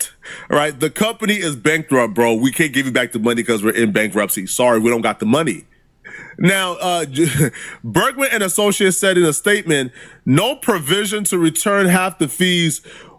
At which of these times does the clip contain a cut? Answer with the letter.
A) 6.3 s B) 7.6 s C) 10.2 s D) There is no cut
D